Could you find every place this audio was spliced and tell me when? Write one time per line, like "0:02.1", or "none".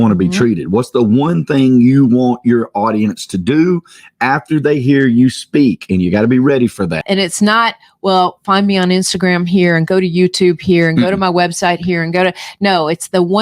0:07.0